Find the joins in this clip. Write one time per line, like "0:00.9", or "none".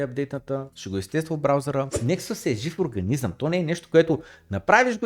0:02.0